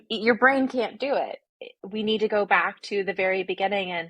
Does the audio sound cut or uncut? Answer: cut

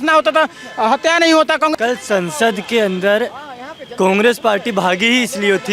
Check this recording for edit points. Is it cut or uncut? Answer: cut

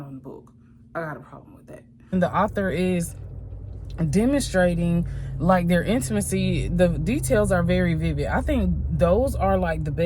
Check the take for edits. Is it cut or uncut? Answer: cut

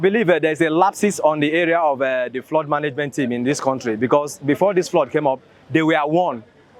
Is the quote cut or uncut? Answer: uncut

